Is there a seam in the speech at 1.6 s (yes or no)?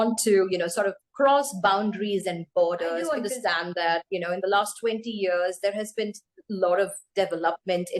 no